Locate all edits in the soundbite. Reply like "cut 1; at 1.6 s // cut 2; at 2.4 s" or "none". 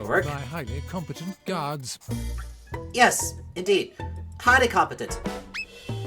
none